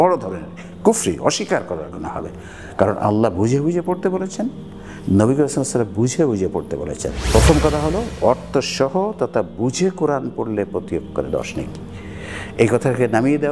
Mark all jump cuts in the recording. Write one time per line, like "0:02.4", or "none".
0:07.3